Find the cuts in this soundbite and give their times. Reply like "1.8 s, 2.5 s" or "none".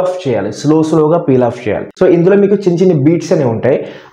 1.9 s